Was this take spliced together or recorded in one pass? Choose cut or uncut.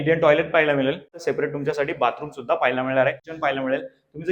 cut